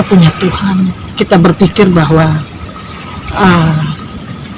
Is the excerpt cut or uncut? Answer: uncut